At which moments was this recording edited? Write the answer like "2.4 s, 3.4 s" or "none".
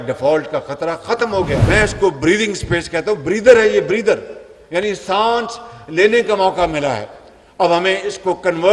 1.6 s